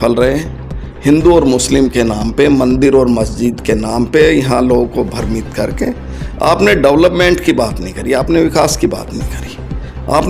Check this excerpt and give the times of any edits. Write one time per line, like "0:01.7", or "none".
none